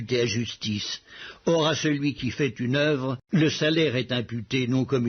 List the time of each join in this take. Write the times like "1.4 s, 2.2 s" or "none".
1.2 s